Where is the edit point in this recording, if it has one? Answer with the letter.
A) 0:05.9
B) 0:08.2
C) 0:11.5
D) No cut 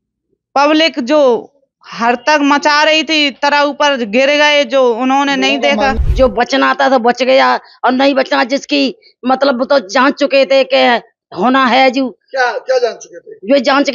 A